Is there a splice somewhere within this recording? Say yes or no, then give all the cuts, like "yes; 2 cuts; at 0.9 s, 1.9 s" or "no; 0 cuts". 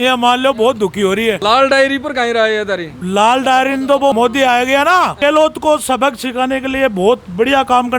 yes; 3 cuts; at 1.4 s, 4.1 s, 5.2 s